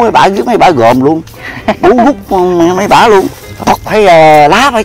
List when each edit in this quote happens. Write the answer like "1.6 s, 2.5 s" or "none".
3.7 s

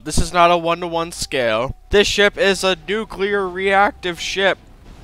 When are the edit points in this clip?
1.8 s

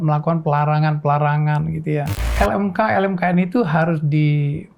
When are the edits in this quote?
2.2 s

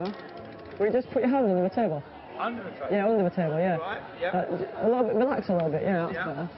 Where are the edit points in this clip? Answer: 0.9 s

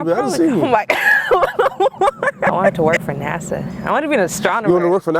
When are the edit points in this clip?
2.6 s

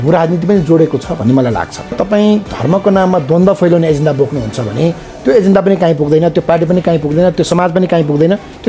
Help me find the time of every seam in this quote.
1.9 s

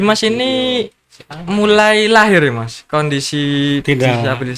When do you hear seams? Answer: none

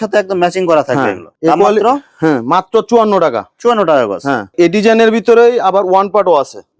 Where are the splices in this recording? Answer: none

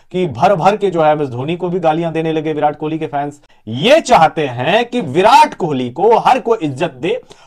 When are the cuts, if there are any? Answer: 3.4 s

